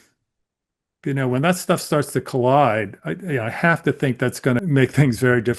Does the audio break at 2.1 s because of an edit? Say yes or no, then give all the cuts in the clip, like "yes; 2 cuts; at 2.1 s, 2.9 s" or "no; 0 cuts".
no; 1 cut; at 4.6 s